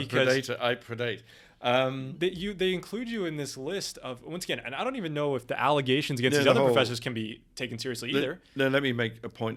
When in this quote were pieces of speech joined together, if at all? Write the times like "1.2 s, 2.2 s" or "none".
none